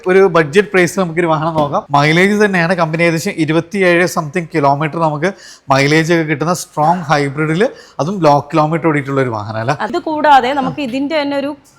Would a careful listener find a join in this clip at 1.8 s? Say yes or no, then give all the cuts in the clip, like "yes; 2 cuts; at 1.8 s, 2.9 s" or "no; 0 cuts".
yes; 2 cuts; at 1.8 s, 9.9 s